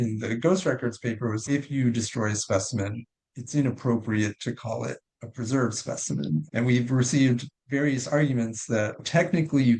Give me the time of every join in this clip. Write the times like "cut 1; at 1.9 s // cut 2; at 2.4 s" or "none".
cut 1; at 1.4 s // cut 2; at 8.9 s